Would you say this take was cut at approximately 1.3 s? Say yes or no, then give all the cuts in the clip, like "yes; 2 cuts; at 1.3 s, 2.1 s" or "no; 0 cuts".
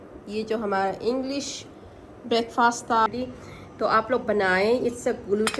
no; 1 cut; at 3.1 s